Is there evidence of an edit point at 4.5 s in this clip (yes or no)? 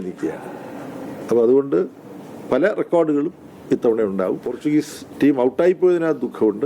yes